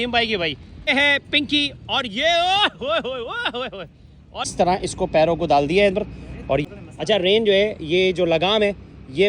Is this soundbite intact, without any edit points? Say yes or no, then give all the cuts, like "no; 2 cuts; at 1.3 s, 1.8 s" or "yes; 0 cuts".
no; 3 cuts; at 0.9 s, 4.5 s, 6.6 s